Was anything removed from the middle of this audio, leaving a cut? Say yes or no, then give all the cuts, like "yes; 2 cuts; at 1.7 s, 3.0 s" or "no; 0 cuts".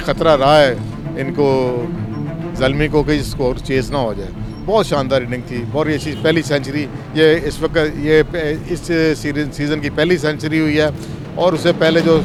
no; 0 cuts